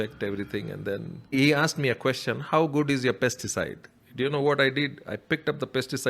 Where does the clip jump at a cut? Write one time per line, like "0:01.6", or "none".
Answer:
0:01.3